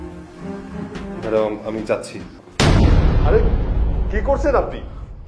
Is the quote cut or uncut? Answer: cut